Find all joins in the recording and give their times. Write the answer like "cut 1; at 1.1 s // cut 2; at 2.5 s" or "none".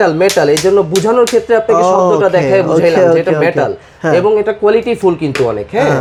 none